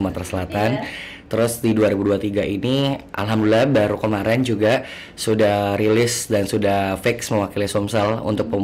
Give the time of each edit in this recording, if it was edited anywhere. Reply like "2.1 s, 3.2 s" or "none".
none